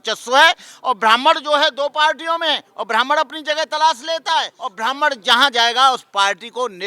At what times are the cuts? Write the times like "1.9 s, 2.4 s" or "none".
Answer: 4.6 s